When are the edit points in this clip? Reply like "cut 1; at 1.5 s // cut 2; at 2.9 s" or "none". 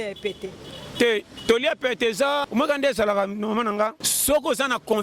cut 1; at 2.5 s // cut 2; at 4.1 s